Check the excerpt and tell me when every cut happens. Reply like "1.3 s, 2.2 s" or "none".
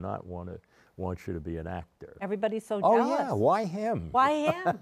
2.2 s